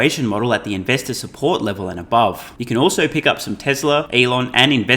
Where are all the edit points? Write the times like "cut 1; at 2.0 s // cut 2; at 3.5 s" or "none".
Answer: cut 1; at 2.5 s // cut 2; at 4.1 s